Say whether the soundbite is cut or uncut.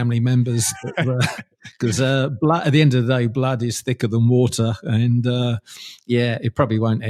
uncut